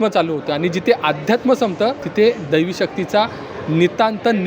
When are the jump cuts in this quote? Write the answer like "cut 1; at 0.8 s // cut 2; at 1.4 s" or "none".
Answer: cut 1; at 2.0 s